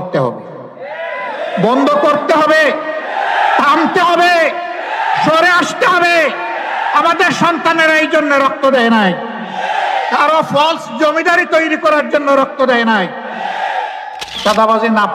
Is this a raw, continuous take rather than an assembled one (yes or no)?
no